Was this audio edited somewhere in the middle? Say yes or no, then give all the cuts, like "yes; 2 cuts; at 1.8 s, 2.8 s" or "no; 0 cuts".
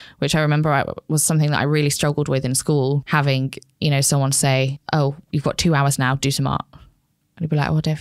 yes; 2 cuts; at 3.0 s, 4.8 s